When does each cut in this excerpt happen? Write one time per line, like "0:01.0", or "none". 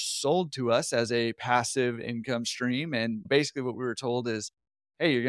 0:03.3